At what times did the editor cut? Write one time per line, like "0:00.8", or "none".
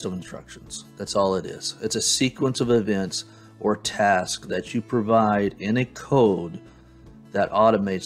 none